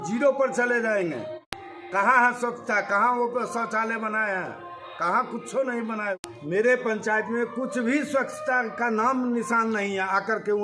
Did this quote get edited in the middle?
yes; 2 cuts; at 1.4 s, 6.2 s

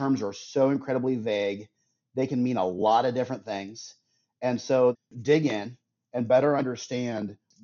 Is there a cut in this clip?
yes; 1 cut; at 5.0 s

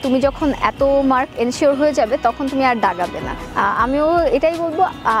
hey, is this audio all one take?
yes; 0 cuts

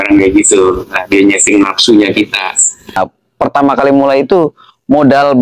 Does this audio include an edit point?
yes; 1 cut; at 3.0 s

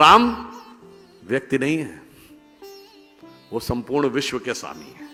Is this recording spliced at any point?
no; 0 cuts

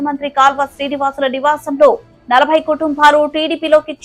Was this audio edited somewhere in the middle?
no; 0 cuts

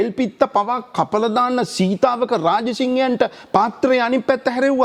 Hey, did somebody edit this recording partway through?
no; 0 cuts

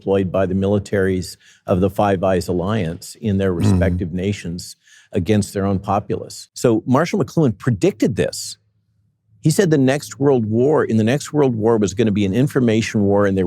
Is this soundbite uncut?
no; 1 cut; at 6.5 s

